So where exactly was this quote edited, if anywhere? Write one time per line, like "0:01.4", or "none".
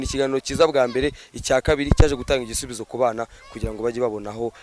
none